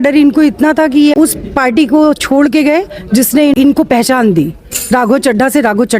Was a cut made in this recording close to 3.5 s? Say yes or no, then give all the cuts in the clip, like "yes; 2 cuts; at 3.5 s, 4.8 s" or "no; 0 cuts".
yes; 2 cuts; at 1.1 s, 3.5 s